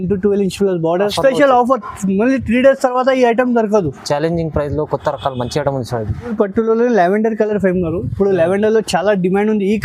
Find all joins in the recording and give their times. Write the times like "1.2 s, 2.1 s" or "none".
1.0 s, 6.3 s